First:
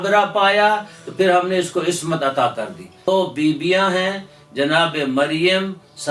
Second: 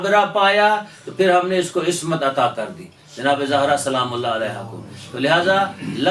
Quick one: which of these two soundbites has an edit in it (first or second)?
first